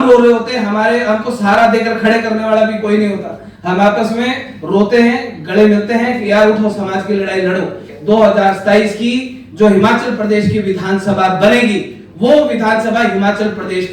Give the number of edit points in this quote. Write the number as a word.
one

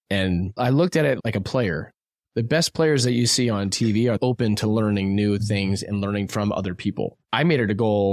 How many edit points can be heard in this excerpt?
two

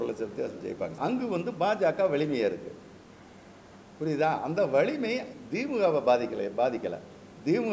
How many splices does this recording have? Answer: one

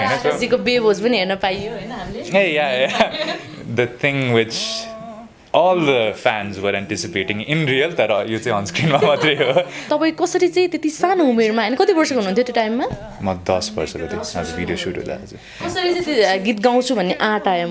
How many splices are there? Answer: one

